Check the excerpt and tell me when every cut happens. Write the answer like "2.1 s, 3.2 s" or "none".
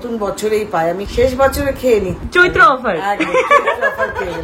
1.1 s